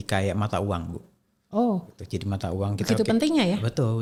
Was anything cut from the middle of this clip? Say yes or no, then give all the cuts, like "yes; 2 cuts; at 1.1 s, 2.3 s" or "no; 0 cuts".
no; 0 cuts